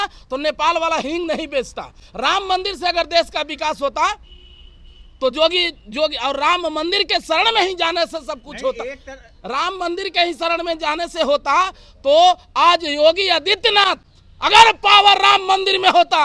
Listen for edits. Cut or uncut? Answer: uncut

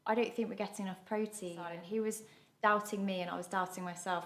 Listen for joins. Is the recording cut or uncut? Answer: cut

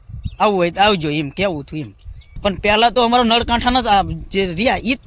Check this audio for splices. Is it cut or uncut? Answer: cut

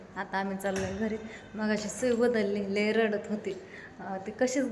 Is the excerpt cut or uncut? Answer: uncut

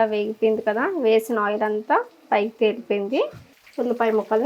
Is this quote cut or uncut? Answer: cut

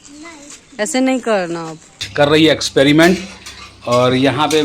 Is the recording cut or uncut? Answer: cut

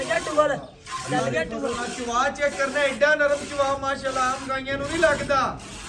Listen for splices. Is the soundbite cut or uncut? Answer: uncut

